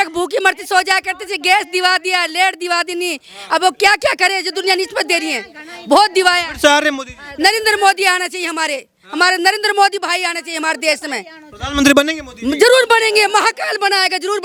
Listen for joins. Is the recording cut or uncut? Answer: uncut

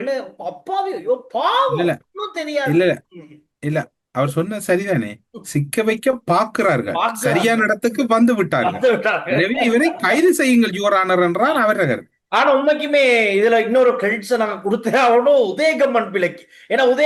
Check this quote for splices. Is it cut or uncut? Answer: uncut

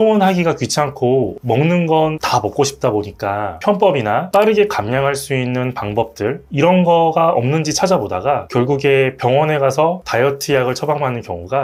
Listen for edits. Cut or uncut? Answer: uncut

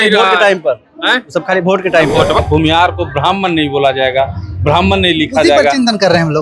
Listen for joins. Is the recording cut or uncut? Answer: cut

